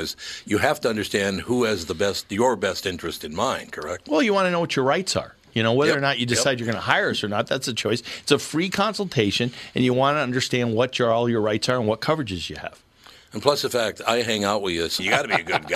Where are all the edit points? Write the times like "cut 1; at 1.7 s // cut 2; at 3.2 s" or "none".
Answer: none